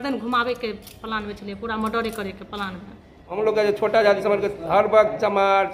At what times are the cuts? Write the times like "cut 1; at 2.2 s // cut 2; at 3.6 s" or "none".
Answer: cut 1; at 3.3 s